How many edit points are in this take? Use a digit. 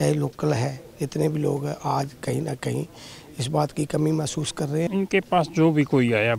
1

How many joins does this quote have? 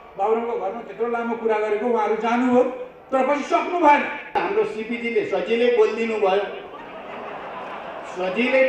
1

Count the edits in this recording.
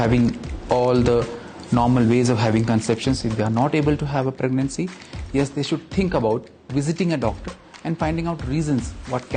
0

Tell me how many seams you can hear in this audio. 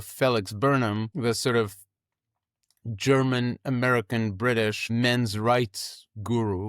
2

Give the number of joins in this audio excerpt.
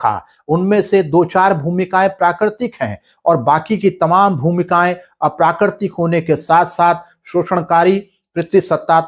0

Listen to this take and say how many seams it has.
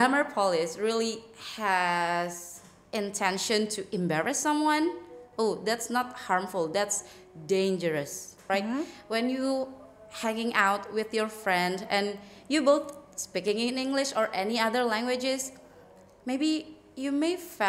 1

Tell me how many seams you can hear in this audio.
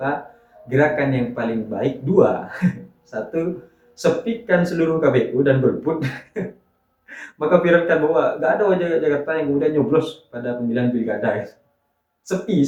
0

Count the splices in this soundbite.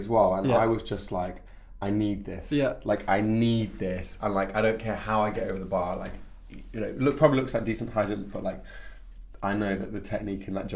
0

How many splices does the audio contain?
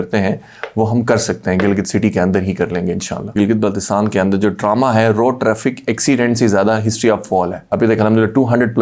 2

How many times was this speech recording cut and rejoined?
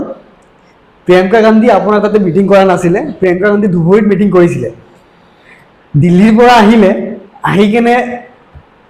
0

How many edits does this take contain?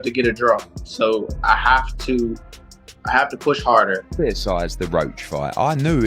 1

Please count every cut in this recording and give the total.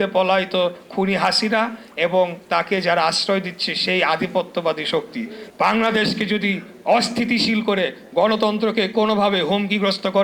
1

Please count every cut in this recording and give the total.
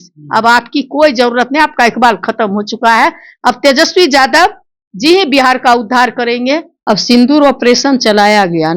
1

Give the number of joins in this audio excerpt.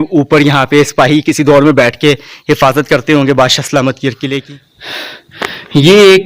1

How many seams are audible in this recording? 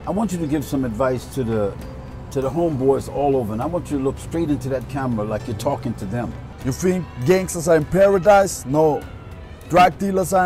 1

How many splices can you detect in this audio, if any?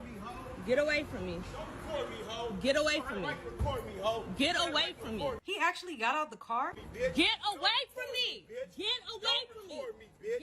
0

